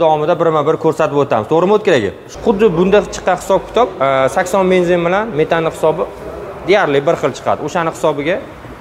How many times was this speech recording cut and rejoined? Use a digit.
1